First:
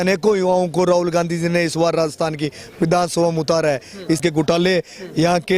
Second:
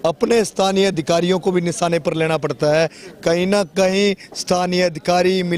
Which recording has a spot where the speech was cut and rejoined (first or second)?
first